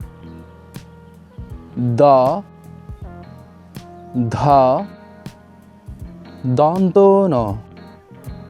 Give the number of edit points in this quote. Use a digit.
3